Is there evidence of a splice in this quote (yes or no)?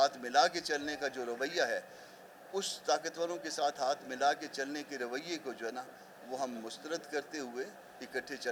no